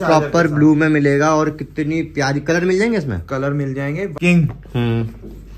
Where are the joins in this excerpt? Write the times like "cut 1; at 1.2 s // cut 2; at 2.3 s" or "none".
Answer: cut 1; at 4.1 s